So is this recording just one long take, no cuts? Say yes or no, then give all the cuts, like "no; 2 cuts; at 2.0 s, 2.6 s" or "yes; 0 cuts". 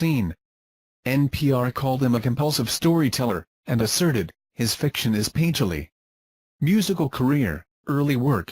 yes; 0 cuts